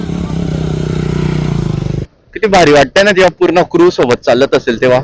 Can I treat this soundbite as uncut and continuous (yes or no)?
no